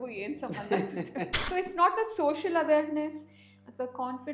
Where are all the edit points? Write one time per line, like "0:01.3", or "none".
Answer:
0:01.4